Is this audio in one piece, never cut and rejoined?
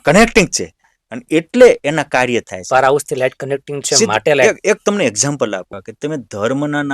no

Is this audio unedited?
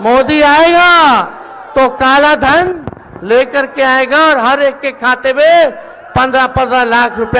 yes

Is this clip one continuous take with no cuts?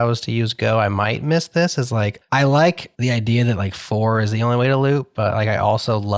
no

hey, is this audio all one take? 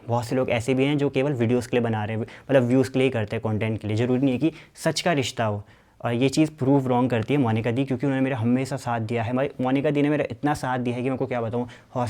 yes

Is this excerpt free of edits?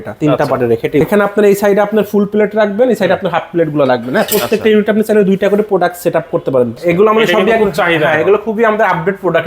no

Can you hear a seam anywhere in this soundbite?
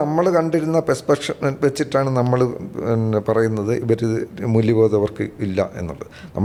no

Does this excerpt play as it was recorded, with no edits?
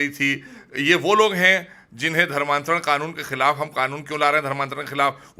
yes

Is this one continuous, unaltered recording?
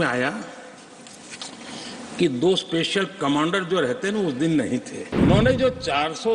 no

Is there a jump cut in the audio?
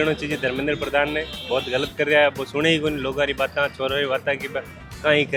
no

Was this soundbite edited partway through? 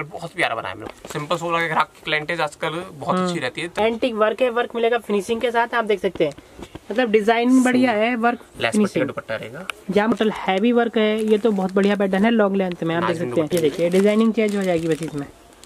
yes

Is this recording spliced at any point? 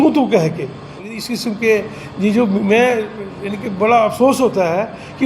yes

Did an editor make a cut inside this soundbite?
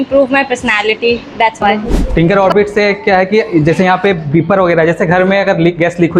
yes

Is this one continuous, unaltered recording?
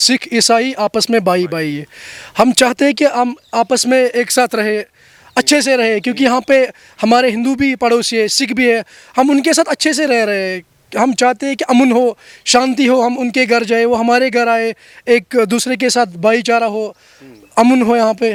yes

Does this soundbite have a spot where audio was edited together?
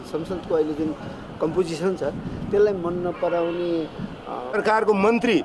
yes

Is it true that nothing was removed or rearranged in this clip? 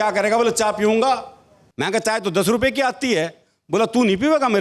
yes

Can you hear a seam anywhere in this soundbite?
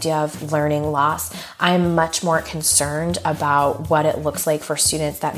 no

